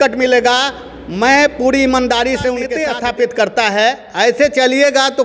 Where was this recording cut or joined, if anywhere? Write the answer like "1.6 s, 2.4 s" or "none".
2.7 s